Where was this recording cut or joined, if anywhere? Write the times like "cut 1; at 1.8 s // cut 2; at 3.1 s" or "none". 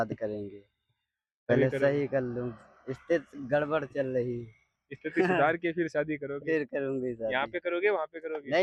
none